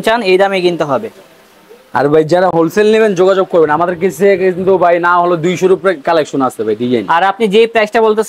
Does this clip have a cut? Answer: no; 0 cuts

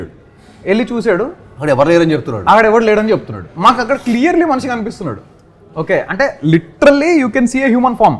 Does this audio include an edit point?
no; 0 cuts

